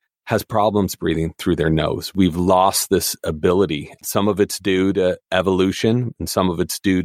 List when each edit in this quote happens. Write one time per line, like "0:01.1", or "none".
none

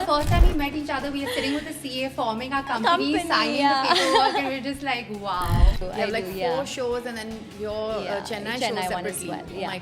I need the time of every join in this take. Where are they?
0:05.8

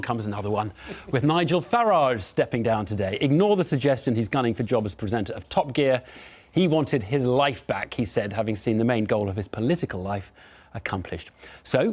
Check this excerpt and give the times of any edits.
0:09.9

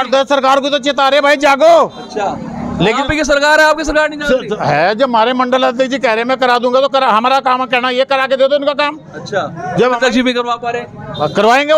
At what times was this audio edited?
none

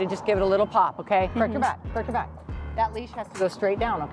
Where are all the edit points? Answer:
0:01.3

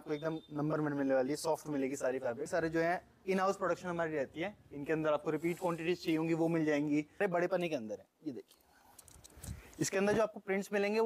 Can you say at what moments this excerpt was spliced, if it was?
0:02.5
0:07.2

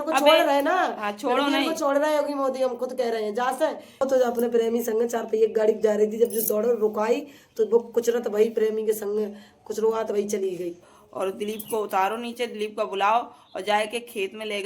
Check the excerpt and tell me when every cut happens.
0:04.0
0:10.9

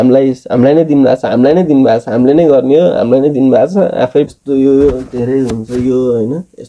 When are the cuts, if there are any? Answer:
0:04.3

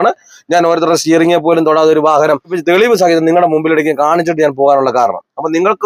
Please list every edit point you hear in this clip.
0:02.7

